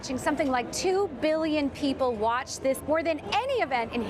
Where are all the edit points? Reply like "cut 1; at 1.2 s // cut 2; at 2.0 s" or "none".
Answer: cut 1; at 3.1 s

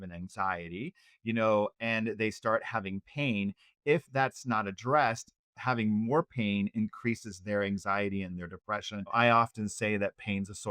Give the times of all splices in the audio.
cut 1; at 9.1 s

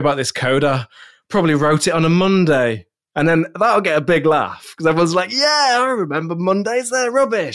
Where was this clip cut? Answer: none

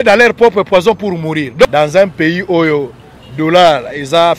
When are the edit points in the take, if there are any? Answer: cut 1; at 1.6 s

